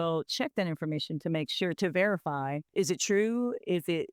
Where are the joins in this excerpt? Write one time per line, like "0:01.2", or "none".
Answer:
0:02.7